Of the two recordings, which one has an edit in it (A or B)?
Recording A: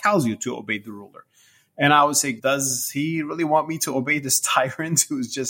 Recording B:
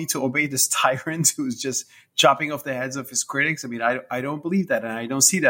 A